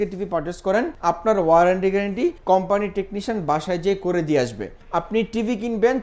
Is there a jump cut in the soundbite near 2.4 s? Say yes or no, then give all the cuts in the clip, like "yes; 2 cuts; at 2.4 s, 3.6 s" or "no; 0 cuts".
yes; 3 cuts; at 0.9 s, 2.4 s, 4.7 s